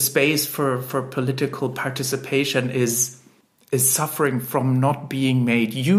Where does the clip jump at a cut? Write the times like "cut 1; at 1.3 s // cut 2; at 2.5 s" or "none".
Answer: none